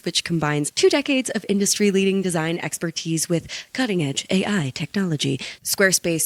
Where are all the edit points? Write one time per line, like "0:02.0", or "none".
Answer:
none